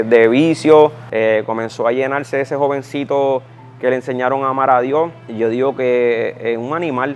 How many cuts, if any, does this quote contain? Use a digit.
2